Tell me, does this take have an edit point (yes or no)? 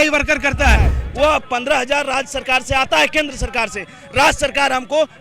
yes